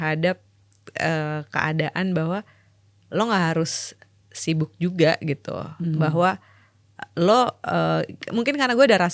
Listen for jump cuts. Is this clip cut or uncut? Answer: uncut